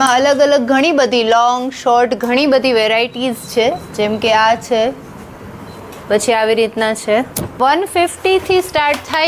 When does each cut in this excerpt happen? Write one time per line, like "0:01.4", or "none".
0:07.6